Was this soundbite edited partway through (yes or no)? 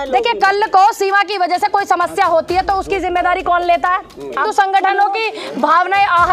yes